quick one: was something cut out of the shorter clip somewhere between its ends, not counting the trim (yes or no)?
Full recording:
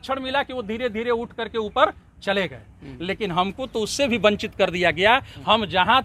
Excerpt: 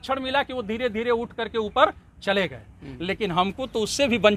no